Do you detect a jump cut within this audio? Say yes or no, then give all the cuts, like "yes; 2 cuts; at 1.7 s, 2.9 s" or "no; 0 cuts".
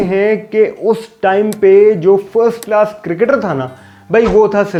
no; 0 cuts